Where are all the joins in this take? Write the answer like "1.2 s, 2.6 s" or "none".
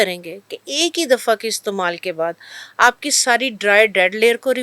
none